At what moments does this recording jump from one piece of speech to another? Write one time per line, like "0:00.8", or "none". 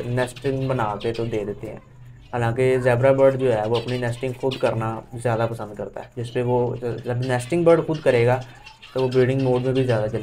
none